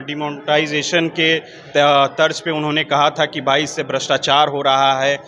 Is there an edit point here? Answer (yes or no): no